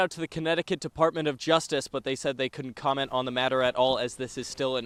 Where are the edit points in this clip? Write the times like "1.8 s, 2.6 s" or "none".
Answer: none